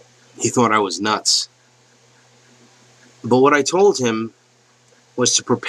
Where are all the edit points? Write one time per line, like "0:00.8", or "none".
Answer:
none